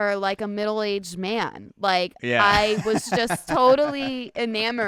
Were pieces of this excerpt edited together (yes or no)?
no